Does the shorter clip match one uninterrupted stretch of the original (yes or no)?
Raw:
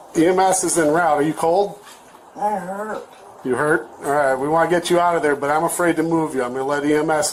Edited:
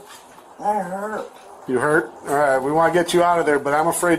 yes